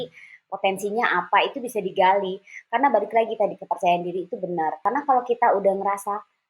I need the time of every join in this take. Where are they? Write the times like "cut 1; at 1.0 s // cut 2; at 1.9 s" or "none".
cut 1; at 4.8 s

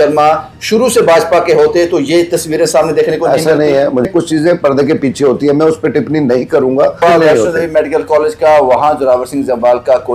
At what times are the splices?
cut 1; at 4.1 s // cut 2; at 7.0 s

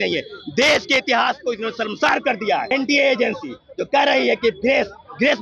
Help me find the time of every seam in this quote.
cut 1; at 2.7 s

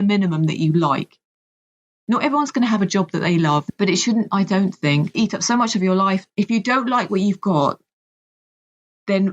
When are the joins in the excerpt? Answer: cut 1; at 3.6 s // cut 2; at 5.1 s // cut 3; at 6.2 s

